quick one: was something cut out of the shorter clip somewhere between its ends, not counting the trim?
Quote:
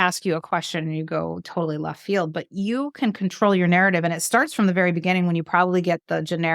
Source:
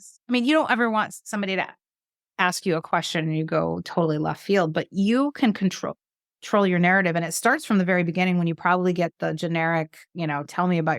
yes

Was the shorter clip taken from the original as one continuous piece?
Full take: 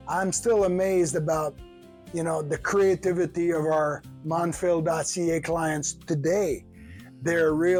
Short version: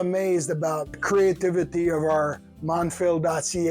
no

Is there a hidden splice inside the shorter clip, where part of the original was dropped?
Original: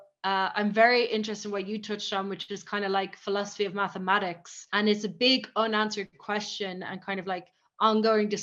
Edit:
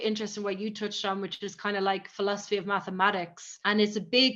no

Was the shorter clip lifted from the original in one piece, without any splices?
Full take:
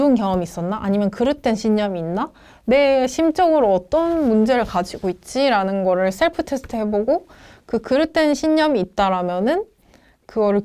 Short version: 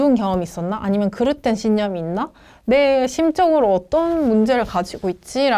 yes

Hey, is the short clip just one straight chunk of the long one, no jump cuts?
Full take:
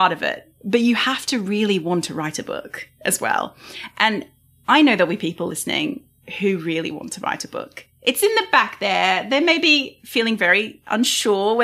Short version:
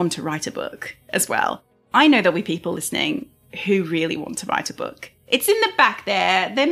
no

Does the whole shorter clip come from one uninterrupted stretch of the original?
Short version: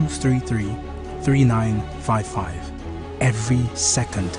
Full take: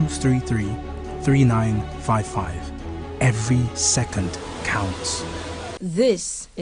yes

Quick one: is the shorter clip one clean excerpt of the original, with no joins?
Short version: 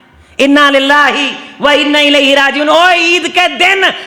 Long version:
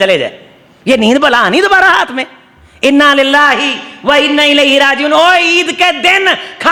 yes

